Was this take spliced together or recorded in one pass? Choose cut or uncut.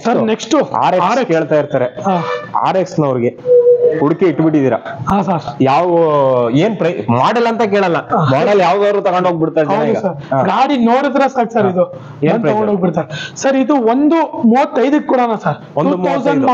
uncut